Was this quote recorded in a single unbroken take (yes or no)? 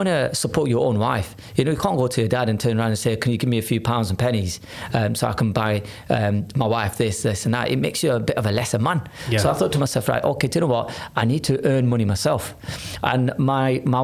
yes